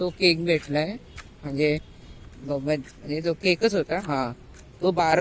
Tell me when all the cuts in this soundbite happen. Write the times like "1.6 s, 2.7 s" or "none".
none